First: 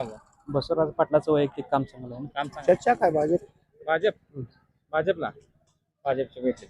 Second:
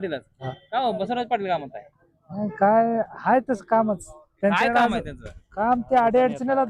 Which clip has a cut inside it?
first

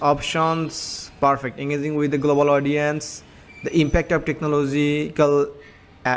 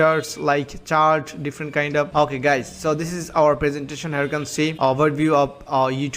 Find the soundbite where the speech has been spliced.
second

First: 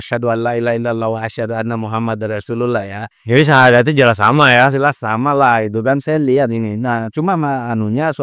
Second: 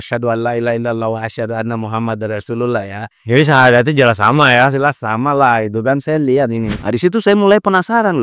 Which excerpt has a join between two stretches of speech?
second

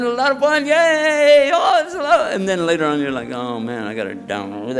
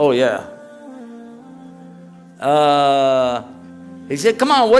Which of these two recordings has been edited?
second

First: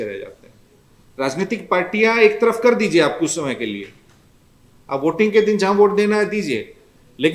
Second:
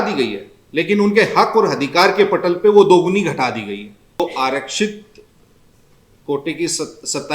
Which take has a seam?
second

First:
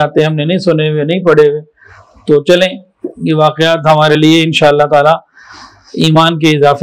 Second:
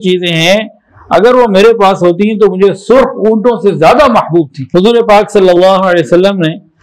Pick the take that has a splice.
second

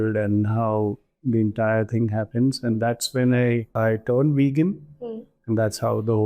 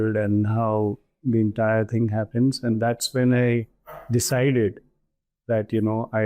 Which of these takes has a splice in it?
first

